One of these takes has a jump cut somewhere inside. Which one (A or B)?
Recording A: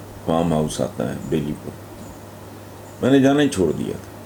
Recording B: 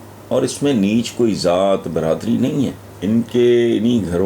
B